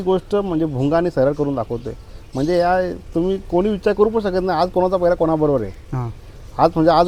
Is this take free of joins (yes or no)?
yes